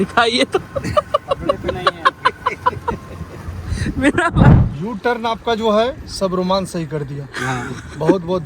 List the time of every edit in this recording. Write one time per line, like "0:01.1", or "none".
0:04.6